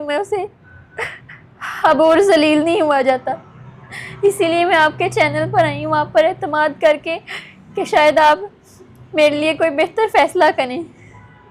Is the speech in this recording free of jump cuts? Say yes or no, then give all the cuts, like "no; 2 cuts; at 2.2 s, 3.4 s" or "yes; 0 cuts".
yes; 0 cuts